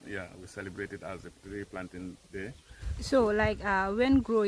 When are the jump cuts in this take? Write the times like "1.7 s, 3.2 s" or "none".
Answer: 3.1 s

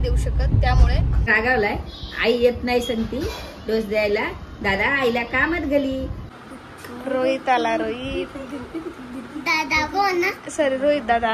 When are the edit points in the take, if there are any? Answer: 1.2 s, 6.2 s, 10.3 s

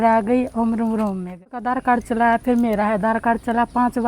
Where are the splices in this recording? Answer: 1.6 s

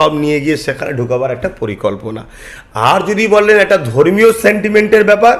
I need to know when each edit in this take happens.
none

